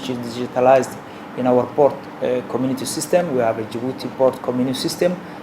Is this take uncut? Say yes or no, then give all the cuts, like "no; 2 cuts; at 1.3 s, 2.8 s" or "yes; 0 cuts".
yes; 0 cuts